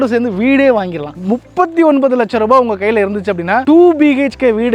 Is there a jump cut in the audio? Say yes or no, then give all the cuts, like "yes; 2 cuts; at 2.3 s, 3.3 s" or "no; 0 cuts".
yes; 1 cut; at 1.2 s